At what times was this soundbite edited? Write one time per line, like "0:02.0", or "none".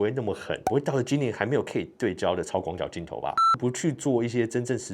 0:03.5